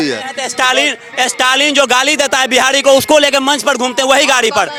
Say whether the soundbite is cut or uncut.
uncut